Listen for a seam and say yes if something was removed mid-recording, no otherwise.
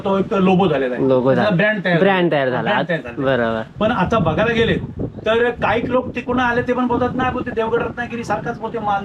no